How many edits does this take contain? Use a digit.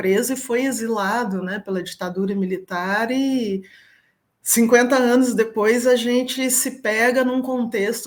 0